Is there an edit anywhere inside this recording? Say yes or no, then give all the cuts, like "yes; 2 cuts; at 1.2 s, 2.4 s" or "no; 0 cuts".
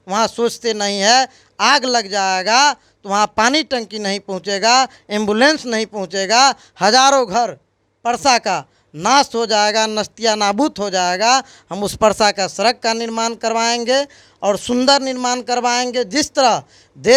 no; 0 cuts